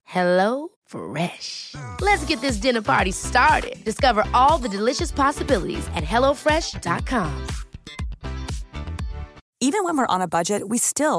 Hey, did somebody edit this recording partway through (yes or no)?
yes